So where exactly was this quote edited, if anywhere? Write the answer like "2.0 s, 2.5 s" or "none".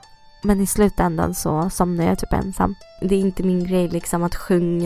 2.9 s